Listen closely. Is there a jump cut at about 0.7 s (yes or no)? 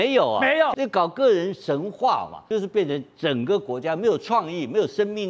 yes